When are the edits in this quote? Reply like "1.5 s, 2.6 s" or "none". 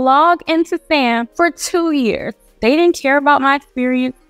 1.3 s, 2.5 s